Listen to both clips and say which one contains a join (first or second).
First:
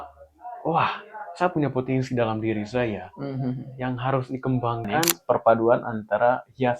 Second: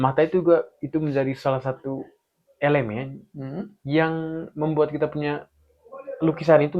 first